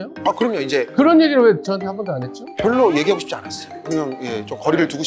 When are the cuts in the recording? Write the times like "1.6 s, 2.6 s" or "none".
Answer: 0.9 s

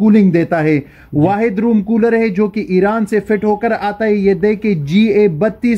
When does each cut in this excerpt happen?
none

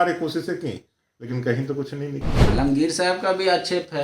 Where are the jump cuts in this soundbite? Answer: 2.4 s

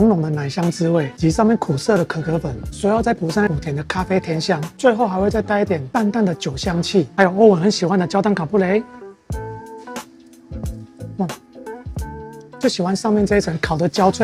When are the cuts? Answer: none

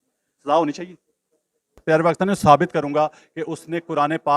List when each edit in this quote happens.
1.8 s

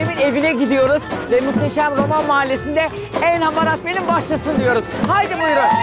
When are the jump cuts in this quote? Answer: none

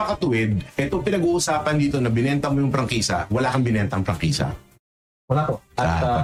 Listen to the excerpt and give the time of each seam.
none

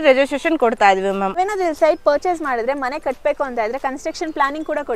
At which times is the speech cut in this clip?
1.3 s

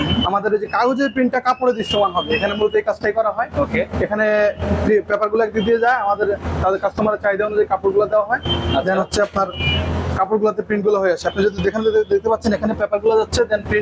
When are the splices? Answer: none

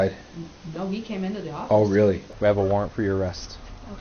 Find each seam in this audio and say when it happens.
2.3 s

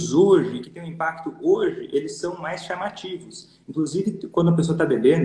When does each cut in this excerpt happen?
none

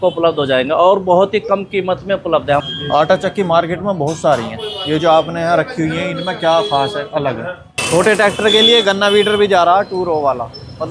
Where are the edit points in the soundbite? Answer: 2.6 s, 7.8 s

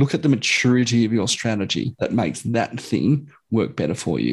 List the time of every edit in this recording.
1.9 s

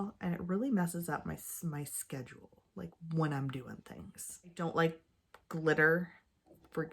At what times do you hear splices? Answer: 4.6 s

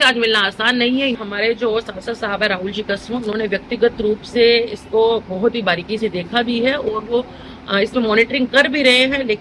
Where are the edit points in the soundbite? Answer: 1.2 s

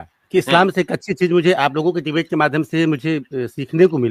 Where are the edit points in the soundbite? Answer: none

